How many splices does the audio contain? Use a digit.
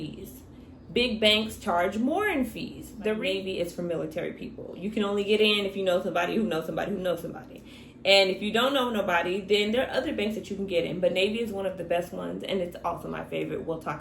1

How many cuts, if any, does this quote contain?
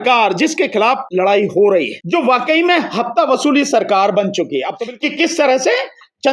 3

